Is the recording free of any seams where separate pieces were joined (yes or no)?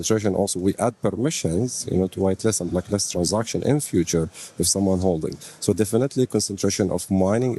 yes